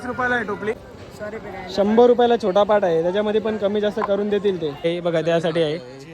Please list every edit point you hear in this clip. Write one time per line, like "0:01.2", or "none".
0:00.9
0:04.9